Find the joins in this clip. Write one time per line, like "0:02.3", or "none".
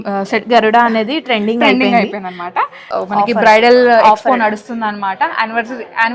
0:02.8